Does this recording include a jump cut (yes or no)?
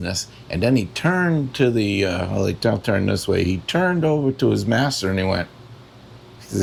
no